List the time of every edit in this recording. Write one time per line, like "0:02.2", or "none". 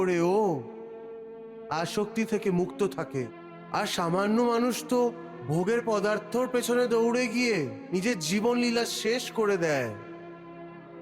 0:03.3